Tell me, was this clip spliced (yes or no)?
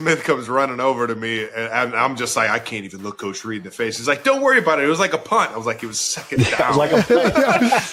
no